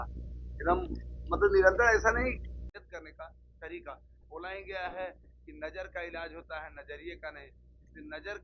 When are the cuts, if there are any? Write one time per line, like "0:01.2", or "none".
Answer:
0:02.5